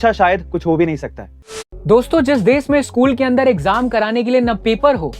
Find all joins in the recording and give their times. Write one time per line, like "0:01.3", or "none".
0:01.6